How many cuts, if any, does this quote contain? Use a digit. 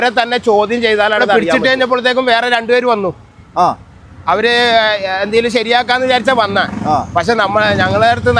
1